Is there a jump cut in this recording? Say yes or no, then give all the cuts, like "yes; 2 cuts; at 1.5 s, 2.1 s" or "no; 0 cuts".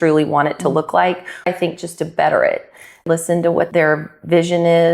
yes; 2 cuts; at 1.5 s, 3.1 s